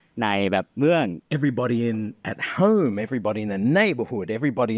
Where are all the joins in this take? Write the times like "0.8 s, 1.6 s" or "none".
1.2 s